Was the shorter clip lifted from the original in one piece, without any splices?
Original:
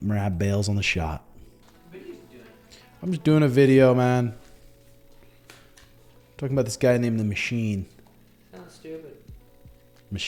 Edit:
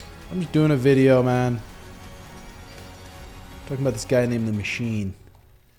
yes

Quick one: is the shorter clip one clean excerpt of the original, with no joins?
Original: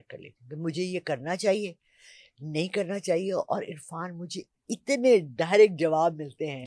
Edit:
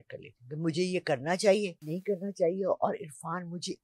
no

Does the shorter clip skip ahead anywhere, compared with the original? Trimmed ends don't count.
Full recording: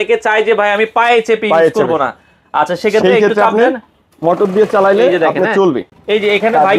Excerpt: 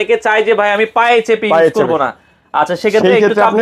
no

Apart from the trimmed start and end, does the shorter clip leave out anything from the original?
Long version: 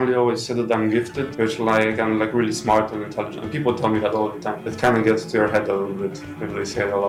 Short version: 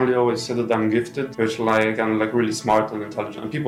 no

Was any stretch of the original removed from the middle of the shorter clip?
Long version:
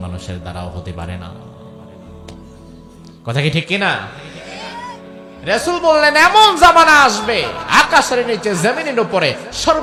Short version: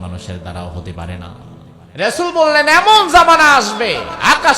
yes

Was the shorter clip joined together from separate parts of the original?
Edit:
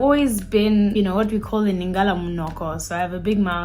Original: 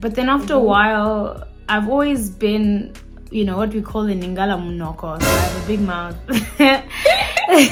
yes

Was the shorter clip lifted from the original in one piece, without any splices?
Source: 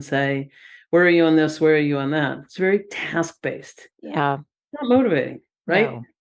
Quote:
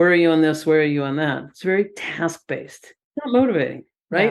no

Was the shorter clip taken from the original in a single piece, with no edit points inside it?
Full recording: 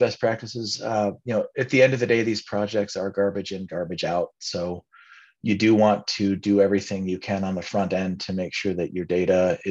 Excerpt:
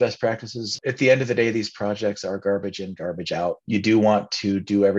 no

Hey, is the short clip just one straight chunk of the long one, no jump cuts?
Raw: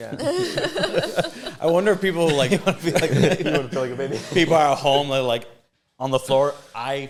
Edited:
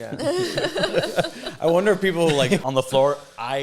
no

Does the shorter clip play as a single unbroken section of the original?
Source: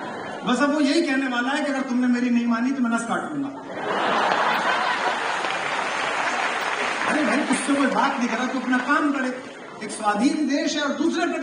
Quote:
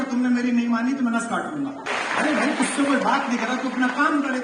no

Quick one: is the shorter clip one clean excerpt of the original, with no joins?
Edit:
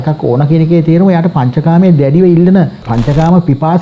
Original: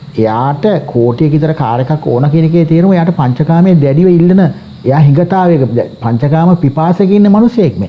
no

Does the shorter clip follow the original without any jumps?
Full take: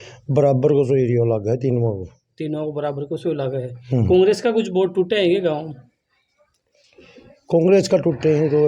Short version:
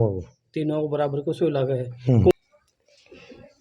no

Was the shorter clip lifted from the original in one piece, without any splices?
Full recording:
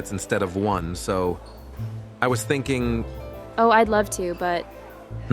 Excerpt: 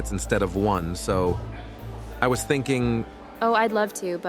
no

